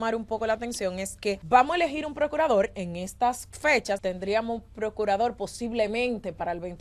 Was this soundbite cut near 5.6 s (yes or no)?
no